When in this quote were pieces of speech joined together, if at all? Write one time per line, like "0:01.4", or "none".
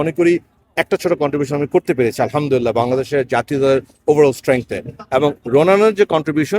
none